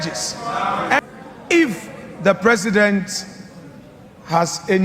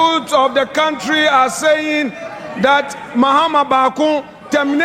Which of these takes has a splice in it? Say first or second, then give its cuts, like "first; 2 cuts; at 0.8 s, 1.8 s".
first; 1 cut; at 1.0 s